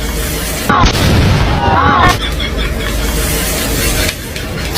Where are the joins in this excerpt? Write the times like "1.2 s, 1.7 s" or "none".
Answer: 2.0 s